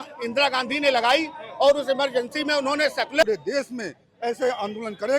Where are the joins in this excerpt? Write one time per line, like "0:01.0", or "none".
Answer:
0:03.2

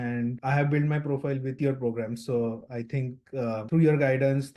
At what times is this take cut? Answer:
none

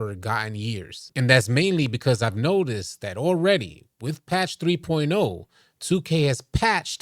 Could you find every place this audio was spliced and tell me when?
0:01.0

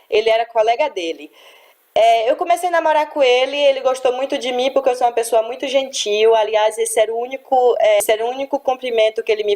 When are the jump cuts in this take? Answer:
0:08.2

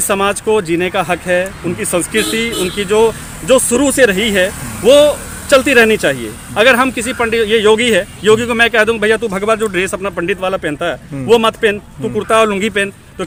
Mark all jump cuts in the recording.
none

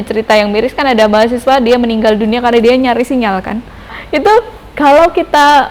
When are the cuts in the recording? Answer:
0:04.0

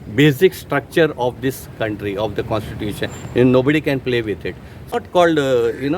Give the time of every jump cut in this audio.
0:04.9

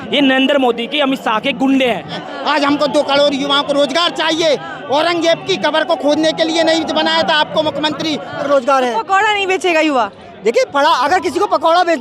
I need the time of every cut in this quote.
0:02.2
0:08.5

